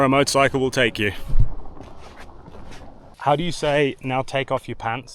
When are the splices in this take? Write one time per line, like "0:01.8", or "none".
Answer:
0:03.1